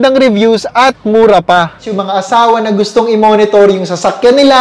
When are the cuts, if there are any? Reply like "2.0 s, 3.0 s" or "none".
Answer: 1.8 s